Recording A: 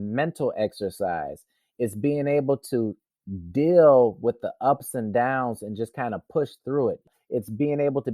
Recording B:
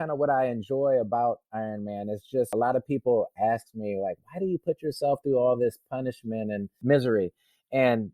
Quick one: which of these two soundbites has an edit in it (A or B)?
B